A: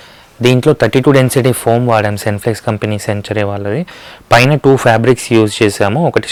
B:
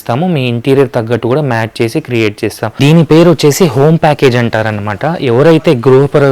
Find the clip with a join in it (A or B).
B